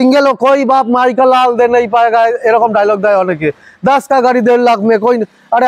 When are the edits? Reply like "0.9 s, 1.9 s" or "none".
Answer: none